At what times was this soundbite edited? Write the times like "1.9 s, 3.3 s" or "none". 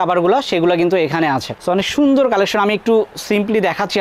none